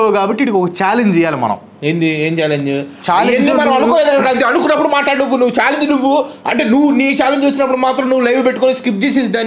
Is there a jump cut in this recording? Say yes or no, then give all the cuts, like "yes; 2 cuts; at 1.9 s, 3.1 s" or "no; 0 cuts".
no; 0 cuts